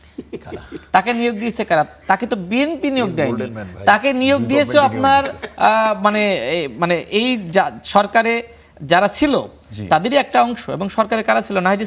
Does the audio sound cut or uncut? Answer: uncut